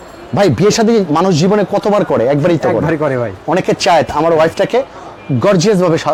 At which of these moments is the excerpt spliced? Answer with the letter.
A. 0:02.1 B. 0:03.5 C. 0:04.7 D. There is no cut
D